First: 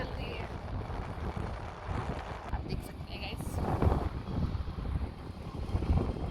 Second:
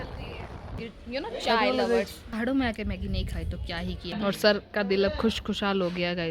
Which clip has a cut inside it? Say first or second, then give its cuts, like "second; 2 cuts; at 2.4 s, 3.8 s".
second; 3 cuts; at 0.9 s, 2.3 s, 4.1 s